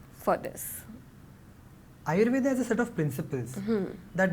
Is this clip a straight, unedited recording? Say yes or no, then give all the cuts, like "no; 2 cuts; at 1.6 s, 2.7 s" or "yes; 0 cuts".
yes; 0 cuts